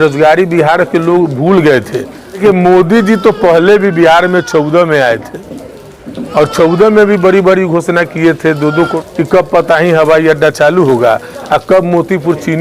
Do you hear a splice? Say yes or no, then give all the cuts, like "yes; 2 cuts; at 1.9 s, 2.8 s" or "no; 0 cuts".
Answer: yes; 2 cuts; at 2.4 s, 8.9 s